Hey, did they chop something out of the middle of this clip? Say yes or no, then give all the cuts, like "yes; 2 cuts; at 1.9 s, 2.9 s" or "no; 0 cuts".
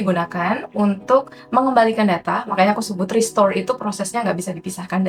no; 0 cuts